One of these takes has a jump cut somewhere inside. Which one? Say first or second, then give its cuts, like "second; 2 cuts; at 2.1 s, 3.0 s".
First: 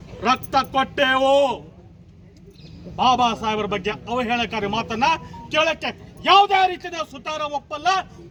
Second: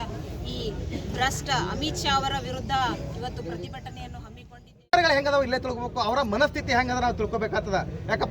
second; 1 cut; at 4.8 s